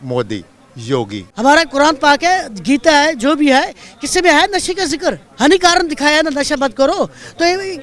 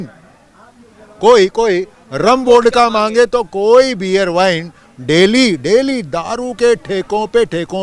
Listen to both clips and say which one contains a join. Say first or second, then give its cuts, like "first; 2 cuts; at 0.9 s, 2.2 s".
first; 2 cuts; at 1.2 s, 5.3 s